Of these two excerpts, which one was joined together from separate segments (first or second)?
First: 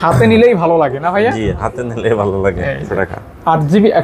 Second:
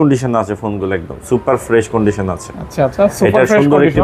first